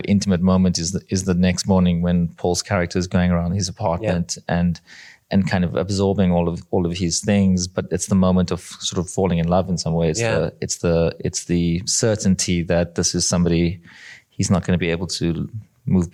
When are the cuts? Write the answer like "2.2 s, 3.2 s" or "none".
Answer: none